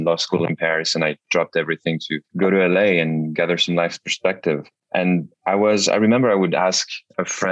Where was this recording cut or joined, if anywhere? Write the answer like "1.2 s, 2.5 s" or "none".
2.2 s, 5.0 s